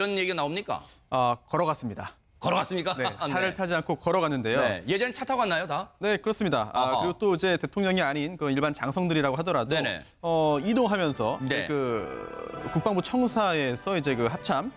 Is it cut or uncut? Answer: uncut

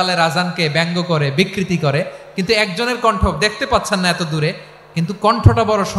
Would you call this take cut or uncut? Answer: uncut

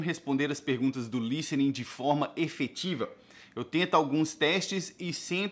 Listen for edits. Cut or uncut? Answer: uncut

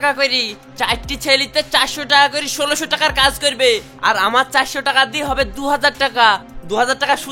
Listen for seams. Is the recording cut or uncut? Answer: uncut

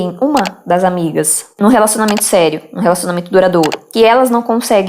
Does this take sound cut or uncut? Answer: cut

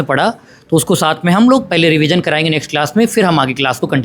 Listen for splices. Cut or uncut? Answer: uncut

